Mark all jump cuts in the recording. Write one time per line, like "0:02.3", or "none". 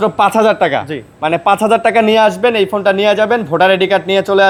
none